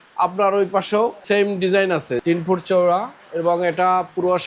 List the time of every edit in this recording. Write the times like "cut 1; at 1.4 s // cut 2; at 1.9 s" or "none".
cut 1; at 1.2 s // cut 2; at 2.2 s